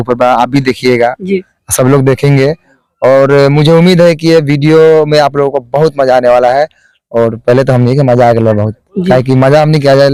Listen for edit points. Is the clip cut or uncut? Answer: uncut